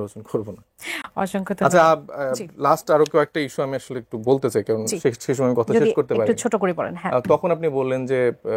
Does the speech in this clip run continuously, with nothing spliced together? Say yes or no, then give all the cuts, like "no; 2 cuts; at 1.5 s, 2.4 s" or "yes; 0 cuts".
yes; 0 cuts